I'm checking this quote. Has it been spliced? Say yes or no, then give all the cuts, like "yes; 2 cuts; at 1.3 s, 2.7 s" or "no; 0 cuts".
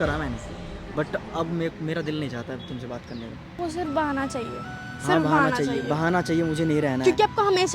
yes; 1 cut; at 3.6 s